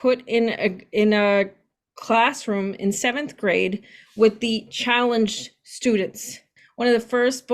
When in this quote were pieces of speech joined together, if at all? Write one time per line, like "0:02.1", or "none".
0:06.6